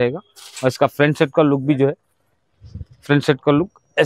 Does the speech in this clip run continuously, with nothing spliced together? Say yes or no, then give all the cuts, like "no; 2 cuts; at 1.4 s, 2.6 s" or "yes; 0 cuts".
yes; 0 cuts